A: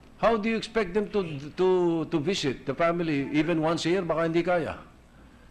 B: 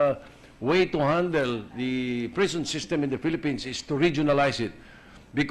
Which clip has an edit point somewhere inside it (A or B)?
A